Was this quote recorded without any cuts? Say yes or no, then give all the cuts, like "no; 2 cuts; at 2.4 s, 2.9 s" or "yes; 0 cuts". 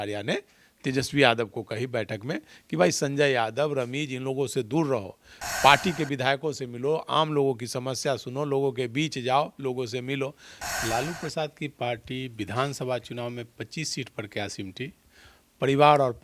no; 1 cut; at 10.5 s